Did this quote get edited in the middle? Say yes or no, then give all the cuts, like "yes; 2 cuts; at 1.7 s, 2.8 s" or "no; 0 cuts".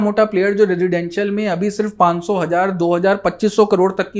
no; 0 cuts